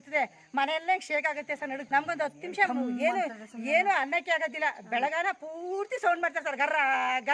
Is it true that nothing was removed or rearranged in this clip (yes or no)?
no